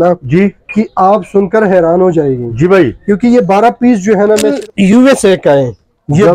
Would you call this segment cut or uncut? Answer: cut